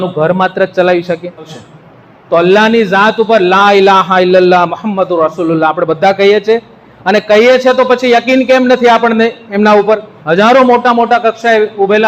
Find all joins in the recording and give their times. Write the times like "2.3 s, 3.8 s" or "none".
1.5 s, 10.2 s